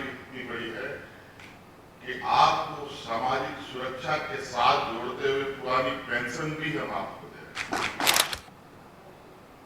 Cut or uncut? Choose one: cut